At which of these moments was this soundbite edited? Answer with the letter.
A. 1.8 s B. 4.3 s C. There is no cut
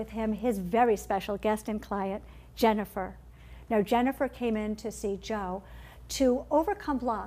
A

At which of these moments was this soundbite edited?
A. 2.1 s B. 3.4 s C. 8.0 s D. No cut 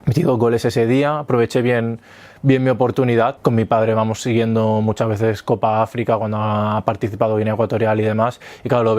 B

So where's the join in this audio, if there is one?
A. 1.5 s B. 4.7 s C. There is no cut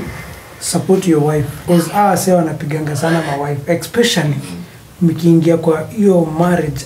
A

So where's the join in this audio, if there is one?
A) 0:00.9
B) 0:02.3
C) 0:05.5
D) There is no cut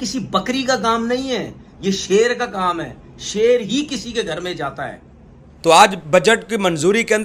C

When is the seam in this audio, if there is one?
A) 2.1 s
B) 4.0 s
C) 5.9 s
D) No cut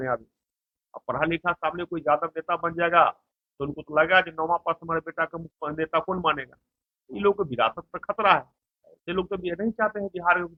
D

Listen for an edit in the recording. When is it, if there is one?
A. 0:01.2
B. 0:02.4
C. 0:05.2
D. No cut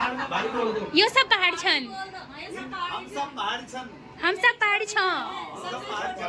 D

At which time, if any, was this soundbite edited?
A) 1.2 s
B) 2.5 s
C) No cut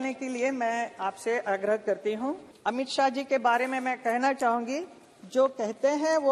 B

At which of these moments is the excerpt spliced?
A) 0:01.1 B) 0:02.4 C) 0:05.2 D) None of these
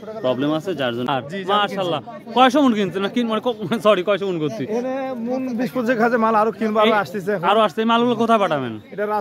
A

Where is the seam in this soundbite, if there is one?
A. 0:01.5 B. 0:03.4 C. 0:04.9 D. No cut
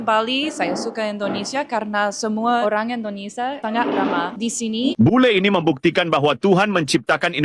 C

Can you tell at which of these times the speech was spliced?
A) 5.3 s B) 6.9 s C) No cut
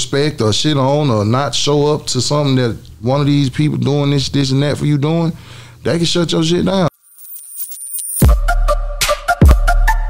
B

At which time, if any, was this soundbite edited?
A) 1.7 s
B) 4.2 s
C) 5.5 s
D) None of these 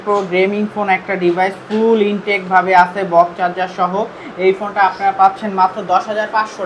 D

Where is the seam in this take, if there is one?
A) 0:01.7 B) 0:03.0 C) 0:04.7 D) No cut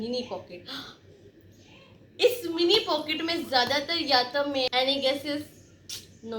C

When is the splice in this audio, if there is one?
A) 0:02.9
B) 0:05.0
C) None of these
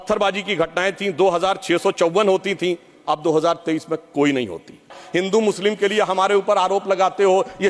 B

